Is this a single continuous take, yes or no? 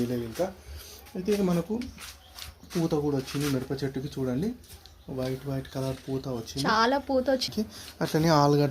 no